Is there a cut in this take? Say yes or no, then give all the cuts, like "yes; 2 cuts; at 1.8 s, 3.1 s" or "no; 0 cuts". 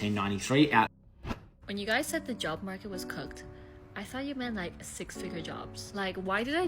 yes; 1 cut; at 0.9 s